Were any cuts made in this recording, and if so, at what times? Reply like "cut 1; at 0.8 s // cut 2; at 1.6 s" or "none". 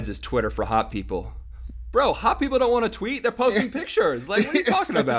none